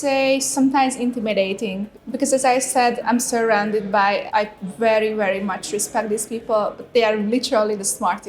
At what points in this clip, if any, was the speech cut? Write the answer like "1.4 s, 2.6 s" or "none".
1.9 s, 3.0 s, 4.3 s